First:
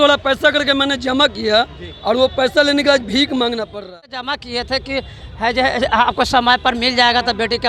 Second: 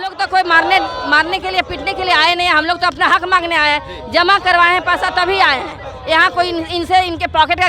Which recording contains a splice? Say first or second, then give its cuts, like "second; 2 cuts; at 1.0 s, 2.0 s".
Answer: first; 1 cut; at 4.3 s